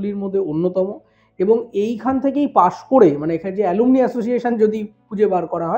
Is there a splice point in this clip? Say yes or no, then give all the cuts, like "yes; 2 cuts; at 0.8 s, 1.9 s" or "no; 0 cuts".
no; 0 cuts